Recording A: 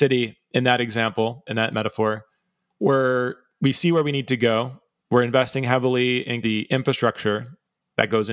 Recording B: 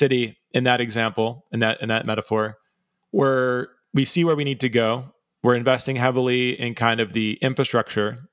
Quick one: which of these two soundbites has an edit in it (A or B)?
A